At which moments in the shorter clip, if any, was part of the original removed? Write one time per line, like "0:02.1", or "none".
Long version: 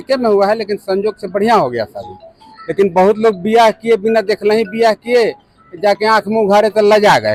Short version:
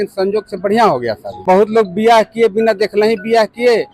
0:01.4